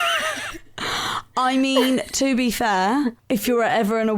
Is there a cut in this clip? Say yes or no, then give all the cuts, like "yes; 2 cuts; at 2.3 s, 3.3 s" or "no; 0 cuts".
yes; 1 cut; at 3.2 s